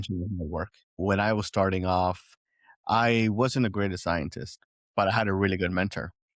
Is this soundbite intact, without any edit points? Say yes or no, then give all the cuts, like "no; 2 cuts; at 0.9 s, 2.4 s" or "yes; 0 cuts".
no; 1 cut; at 1.0 s